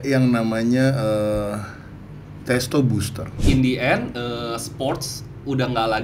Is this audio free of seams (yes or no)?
no